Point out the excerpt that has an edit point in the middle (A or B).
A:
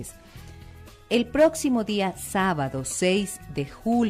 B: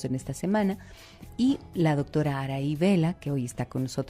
B